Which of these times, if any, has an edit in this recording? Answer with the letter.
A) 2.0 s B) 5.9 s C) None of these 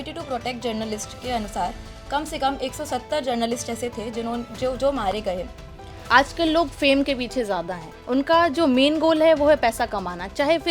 B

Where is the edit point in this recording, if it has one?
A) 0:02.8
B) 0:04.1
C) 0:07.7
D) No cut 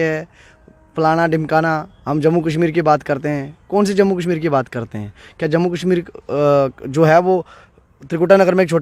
D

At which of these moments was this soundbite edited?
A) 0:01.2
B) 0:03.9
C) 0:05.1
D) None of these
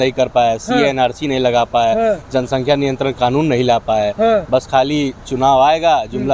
D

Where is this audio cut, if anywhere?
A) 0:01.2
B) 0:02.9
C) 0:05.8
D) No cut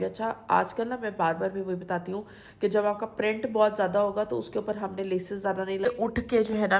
C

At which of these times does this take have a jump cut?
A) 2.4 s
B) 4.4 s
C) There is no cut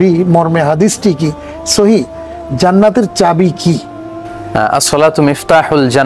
B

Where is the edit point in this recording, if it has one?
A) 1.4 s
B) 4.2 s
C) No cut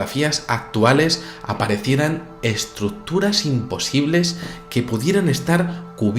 A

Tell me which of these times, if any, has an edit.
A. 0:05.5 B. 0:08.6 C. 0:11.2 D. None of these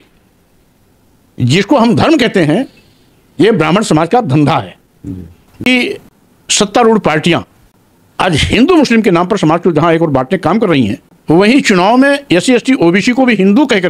A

